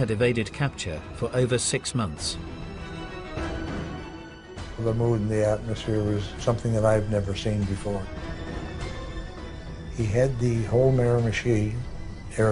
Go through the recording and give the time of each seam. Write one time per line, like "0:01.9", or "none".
none

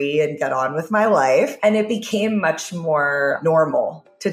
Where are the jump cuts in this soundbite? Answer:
0:01.5
0:03.4

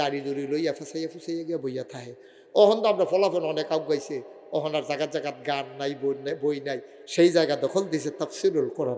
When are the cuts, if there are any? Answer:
none

